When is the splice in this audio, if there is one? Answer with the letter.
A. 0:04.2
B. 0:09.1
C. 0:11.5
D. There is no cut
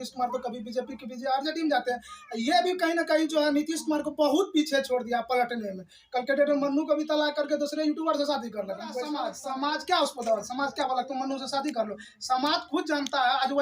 B